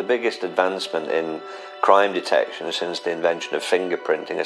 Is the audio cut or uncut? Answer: uncut